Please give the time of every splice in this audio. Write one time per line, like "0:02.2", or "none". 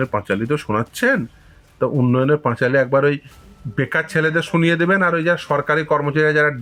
none

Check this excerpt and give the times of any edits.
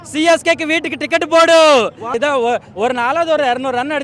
0:02.1

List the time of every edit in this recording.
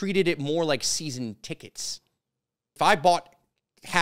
0:02.7

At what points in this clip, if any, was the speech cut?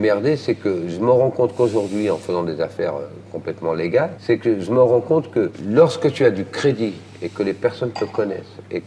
0:04.2
0:05.6

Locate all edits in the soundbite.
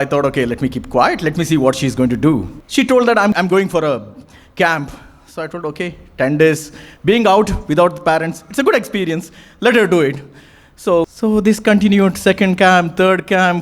0:02.6
0:03.3
0:11.1

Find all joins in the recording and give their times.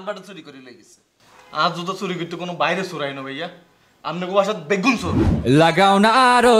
0:05.4

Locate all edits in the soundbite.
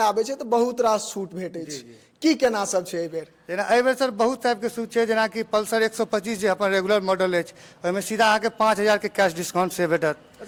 none

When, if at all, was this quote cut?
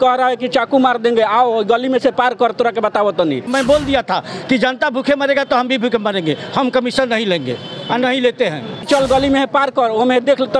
0:03.5
0:08.8

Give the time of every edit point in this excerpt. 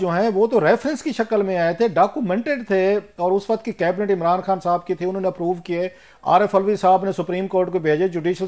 none

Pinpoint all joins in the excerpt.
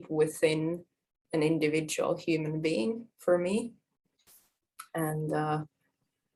none

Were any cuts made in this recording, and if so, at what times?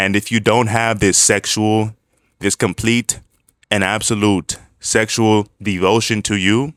none

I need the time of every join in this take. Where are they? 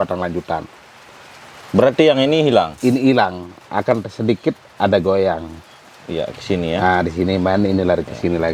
none

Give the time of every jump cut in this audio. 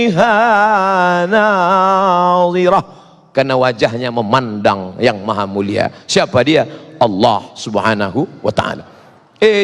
none

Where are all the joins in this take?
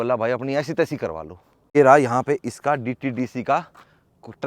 0:01.8

